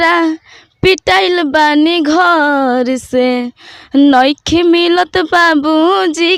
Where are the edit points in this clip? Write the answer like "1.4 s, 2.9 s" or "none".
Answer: none